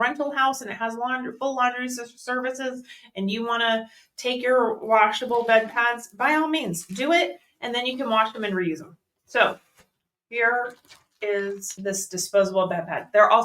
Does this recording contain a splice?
yes; 1 cut; at 11.7 s

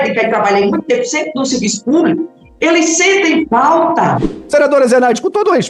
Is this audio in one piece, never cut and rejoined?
no; 1 cut; at 4.3 s

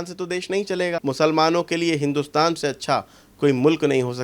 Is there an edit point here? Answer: yes; 1 cut; at 1.0 s

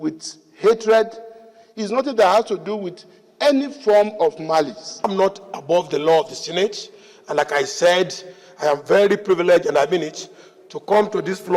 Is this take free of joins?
no; 1 cut; at 5.1 s

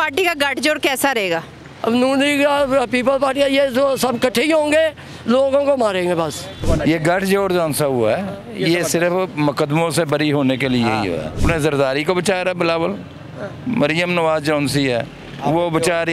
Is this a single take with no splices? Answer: no; 1 cut; at 11.4 s

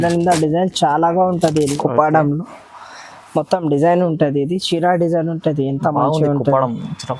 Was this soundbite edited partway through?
yes; 1 cut; at 1.8 s

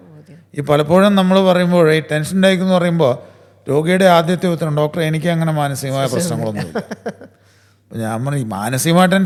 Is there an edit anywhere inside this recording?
no; 0 cuts

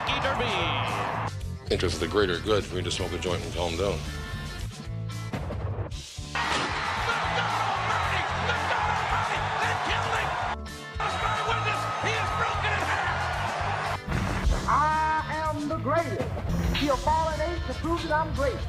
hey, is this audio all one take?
yes; 0 cuts

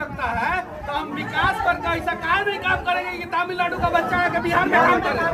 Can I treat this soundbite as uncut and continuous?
yes; 0 cuts

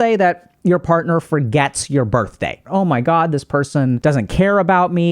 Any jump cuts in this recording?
yes; 2 cuts; at 2.6 s, 4.0 s

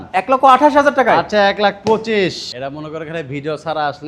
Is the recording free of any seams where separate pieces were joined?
no; 1 cut; at 2.5 s

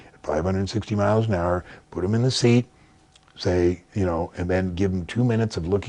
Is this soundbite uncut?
yes; 0 cuts

